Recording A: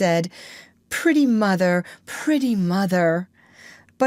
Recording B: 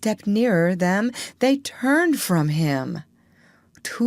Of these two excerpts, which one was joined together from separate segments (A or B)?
B